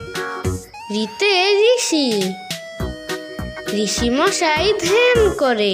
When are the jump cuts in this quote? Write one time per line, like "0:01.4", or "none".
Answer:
none